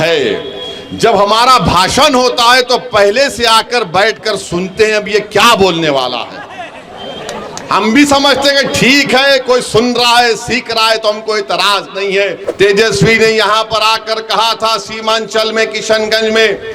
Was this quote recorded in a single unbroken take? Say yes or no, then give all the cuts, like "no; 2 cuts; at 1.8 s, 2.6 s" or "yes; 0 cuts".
no; 1 cut; at 12.4 s